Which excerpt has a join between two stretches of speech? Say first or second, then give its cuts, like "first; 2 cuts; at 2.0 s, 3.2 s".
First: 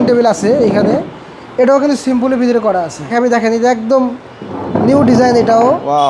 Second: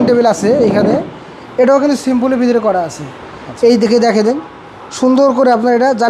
first; 1 cut; at 3.1 s